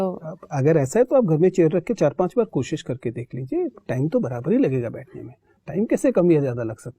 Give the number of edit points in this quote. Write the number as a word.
zero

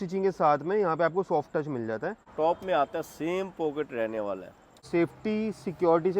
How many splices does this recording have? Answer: two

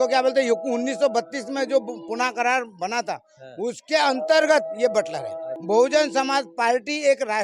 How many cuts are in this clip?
one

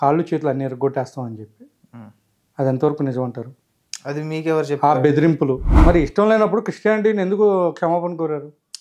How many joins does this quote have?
one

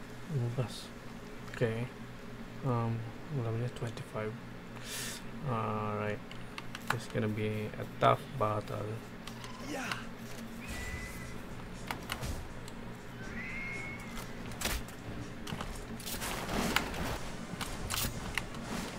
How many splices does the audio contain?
zero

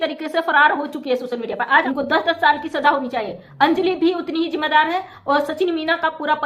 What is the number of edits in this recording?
one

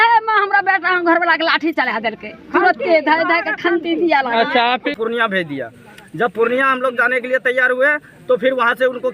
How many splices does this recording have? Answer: one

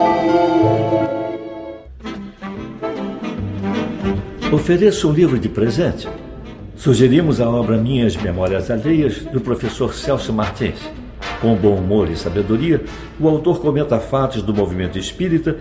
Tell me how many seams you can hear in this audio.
one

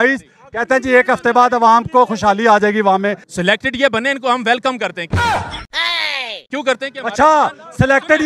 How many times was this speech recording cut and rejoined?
three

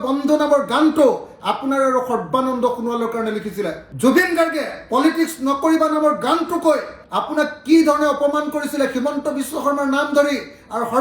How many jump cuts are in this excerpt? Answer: zero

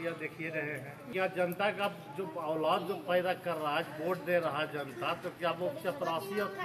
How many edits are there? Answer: one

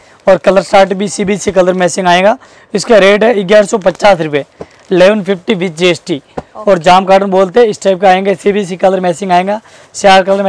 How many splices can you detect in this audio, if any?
zero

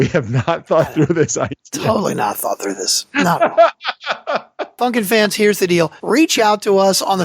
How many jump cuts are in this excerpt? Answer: two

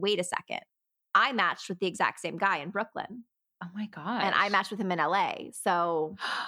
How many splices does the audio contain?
zero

